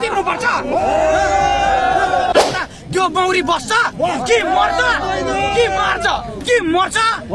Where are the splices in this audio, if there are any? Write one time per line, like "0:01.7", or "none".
0:02.3